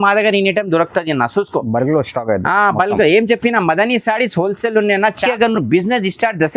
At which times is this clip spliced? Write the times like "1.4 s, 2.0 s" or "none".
5.3 s